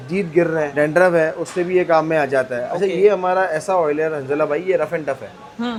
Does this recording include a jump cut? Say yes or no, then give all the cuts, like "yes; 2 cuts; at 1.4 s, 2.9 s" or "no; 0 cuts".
no; 0 cuts